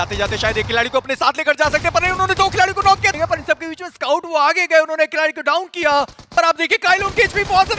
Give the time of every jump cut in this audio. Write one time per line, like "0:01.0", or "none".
0:03.1
0:06.3